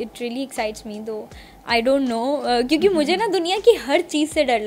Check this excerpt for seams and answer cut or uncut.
uncut